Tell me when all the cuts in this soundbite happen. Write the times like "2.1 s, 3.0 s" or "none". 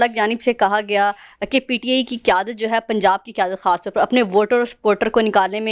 none

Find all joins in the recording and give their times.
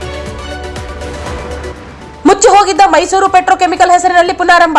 1.8 s

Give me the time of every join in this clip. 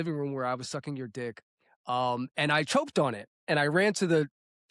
none

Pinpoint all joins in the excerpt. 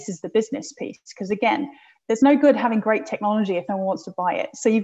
none

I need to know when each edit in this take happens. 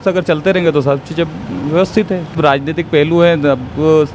2.3 s

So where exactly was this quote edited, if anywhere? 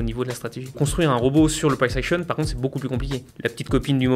0.8 s, 3.3 s

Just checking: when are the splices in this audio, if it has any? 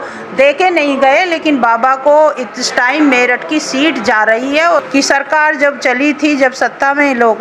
4.8 s

